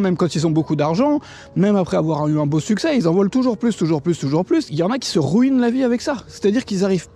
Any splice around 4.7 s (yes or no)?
yes